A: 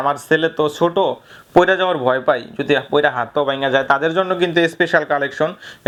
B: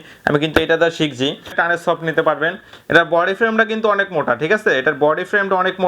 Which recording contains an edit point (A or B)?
B